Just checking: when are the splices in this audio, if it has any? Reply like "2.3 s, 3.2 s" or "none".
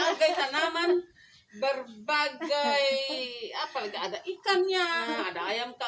5.0 s

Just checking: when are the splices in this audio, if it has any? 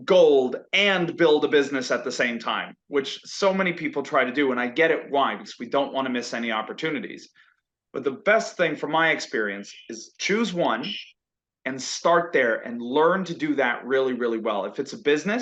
none

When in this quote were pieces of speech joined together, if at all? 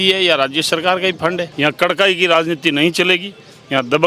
1.5 s

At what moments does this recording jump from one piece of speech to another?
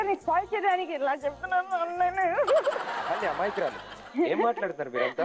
2.9 s

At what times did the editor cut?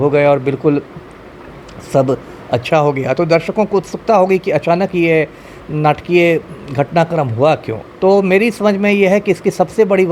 7.8 s

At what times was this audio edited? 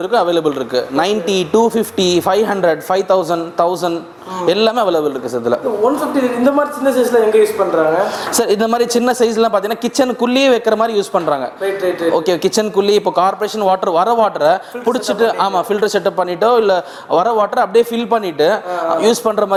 none

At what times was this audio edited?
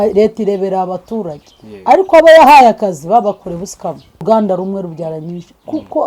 4.2 s

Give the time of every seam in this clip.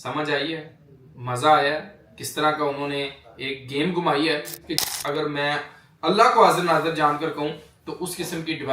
4.8 s

